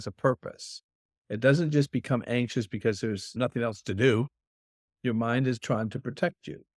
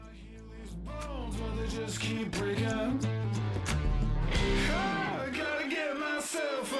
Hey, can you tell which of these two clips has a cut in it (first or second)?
first